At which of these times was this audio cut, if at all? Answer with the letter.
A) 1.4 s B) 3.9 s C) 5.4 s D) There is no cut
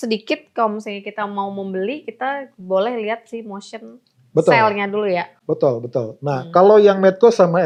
D